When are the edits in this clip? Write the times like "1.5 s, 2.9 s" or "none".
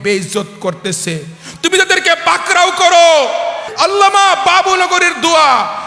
3.7 s